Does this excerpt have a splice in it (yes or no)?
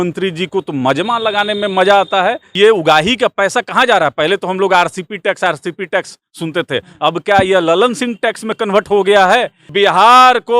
yes